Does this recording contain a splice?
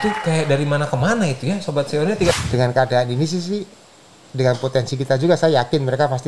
yes; 1 cut; at 2.3 s

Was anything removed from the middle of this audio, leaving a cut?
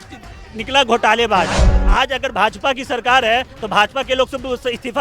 yes; 1 cut; at 1.7 s

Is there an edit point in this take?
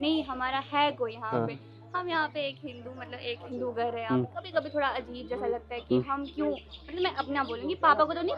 no; 0 cuts

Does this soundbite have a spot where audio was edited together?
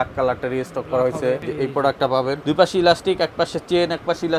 yes; 2 cuts; at 1.4 s, 2.4 s

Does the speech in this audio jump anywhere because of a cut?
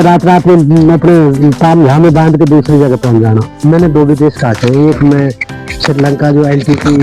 yes; 1 cut; at 3.6 s

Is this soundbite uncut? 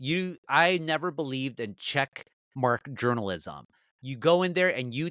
yes; 0 cuts

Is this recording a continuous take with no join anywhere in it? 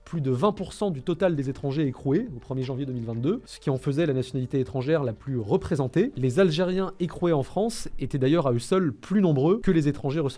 yes; 0 cuts

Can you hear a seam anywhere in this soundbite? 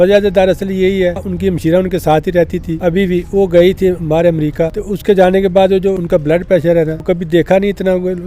yes; 5 cuts; at 1.3 s, 2.7 s, 4.8 s, 6.0 s, 7.0 s

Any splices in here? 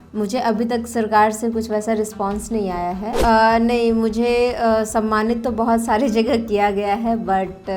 yes; 1 cut; at 3.2 s

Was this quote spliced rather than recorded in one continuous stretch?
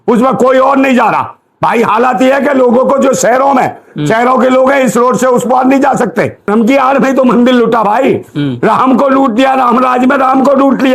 yes; 1 cut; at 6.4 s

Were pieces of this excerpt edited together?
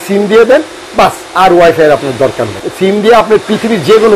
yes; 1 cut; at 2.7 s

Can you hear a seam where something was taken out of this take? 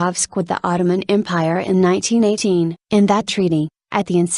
yes; 1 cut; at 3.0 s

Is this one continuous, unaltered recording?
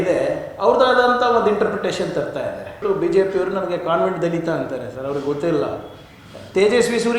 no; 1 cut; at 2.8 s

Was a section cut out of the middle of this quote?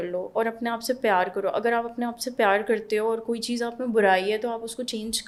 no; 0 cuts

